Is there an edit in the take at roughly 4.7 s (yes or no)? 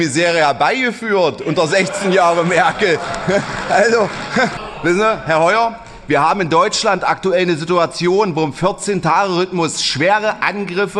yes